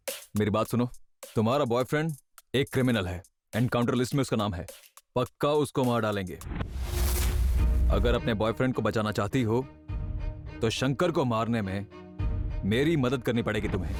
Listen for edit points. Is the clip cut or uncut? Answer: uncut